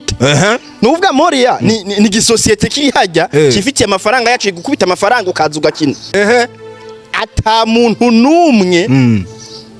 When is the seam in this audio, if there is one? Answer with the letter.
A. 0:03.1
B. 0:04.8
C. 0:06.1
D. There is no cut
C